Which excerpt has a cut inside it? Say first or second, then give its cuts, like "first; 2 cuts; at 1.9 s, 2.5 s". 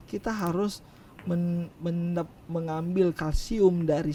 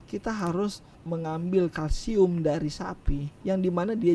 second; 1 cut; at 0.9 s